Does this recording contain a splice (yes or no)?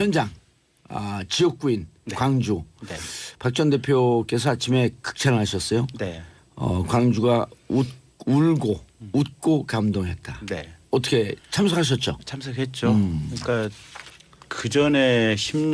no